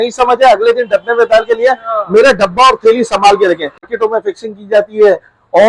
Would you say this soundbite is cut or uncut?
cut